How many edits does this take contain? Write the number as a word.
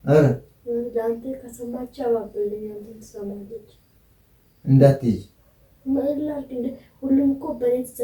zero